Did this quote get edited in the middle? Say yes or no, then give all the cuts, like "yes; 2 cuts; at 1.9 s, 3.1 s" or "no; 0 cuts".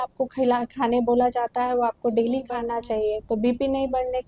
yes; 1 cut; at 2.6 s